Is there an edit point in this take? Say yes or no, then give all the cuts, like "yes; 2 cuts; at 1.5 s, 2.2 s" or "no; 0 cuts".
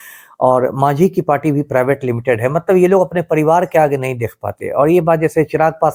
no; 0 cuts